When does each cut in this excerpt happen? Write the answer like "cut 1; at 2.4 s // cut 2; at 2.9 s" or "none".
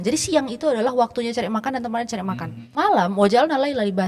cut 1; at 2.5 s